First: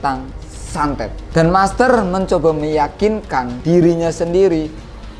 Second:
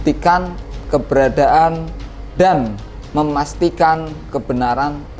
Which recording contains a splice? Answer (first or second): first